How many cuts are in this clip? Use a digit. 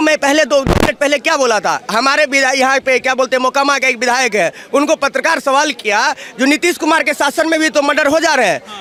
0